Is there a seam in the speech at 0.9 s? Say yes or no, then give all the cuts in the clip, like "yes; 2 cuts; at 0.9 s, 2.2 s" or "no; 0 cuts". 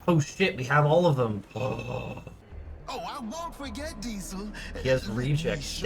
no; 1 cut; at 2.4 s